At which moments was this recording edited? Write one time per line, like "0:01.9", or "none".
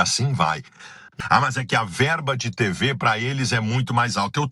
0:01.0